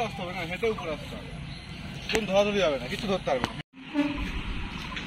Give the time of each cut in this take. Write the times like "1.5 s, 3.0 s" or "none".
none